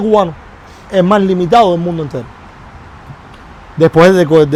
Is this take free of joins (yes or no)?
yes